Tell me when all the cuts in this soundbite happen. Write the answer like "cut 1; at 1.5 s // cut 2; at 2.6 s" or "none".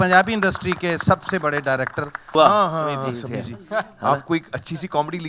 cut 1; at 2.3 s